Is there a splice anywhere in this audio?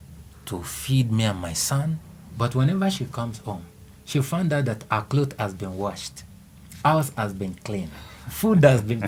no; 0 cuts

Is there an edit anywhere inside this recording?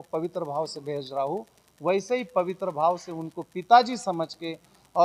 no; 0 cuts

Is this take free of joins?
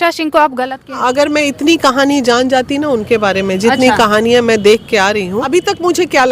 no; 2 cuts; at 1.0 s, 5.5 s

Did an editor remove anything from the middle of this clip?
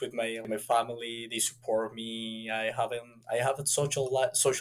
no; 0 cuts

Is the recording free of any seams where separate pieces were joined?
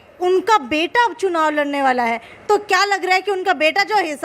yes; 0 cuts

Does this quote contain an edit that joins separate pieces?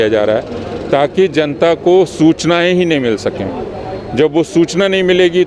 no; 0 cuts

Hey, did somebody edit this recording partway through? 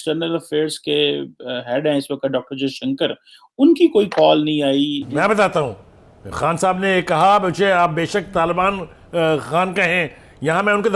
yes; 1 cut; at 5.0 s

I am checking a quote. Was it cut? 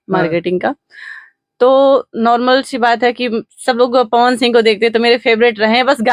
no; 0 cuts

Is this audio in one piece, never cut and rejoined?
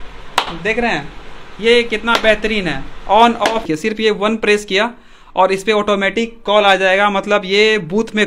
no; 1 cut; at 3.7 s

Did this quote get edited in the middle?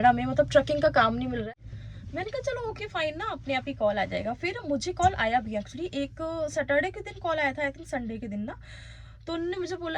yes; 1 cut; at 1.5 s

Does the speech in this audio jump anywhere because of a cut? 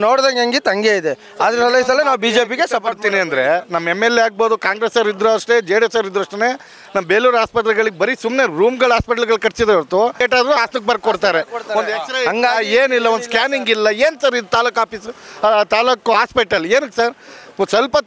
no; 0 cuts

